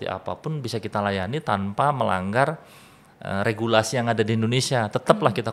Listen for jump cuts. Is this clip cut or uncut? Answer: uncut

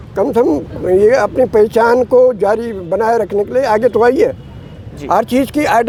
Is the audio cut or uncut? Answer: uncut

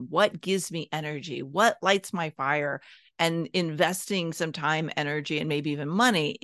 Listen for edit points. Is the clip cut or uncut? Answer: uncut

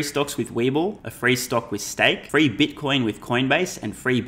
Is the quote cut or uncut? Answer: cut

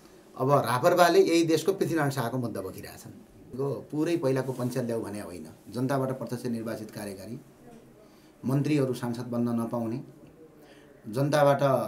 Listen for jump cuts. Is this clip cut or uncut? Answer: cut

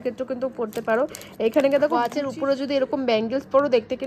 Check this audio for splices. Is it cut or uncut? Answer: cut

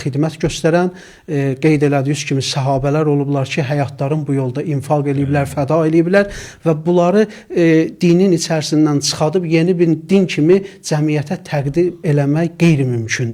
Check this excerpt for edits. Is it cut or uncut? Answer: uncut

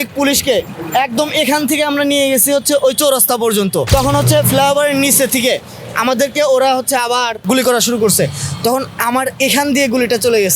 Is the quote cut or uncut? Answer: cut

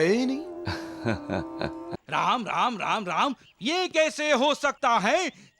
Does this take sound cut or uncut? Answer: cut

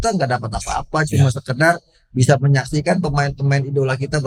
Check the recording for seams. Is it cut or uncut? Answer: uncut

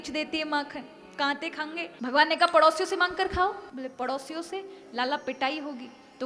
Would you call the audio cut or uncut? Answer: cut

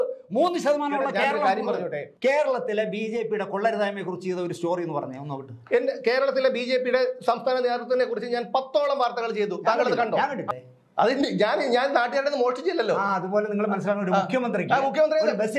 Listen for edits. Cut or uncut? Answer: cut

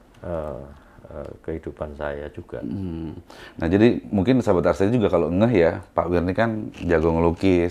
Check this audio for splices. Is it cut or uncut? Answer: uncut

